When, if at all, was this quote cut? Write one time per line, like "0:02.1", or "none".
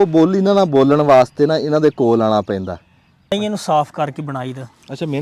0:03.3